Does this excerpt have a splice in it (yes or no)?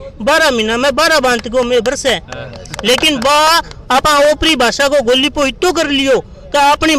no